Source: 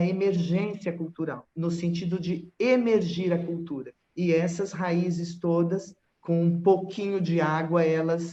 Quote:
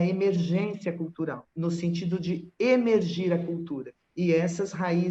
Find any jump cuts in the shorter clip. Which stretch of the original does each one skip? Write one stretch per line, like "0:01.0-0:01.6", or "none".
none